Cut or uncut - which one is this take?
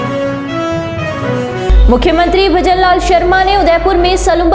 cut